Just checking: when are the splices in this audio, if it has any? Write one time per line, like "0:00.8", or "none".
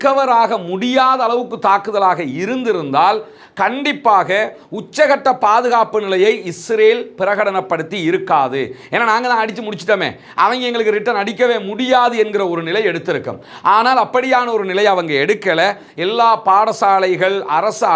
none